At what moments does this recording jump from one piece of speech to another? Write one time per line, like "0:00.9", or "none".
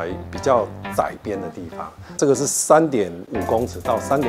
0:02.2
0:03.3